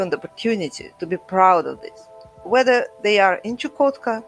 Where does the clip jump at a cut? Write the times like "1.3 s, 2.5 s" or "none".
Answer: 2.4 s